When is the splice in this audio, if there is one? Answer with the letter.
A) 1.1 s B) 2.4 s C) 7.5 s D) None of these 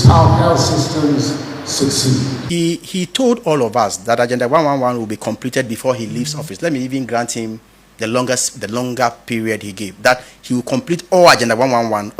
B